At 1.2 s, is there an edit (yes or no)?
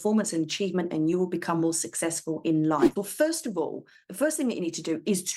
no